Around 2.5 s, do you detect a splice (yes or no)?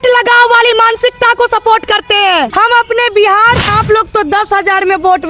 yes